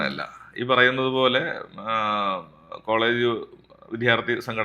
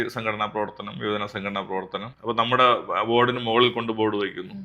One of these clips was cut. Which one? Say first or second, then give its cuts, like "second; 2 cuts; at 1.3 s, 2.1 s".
second; 1 cut; at 2.0 s